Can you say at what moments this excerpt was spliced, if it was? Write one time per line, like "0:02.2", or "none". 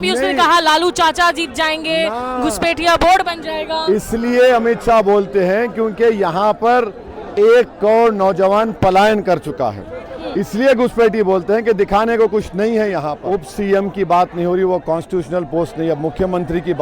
0:13.2